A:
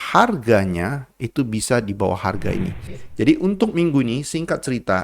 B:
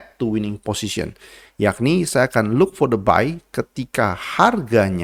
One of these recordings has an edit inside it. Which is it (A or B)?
A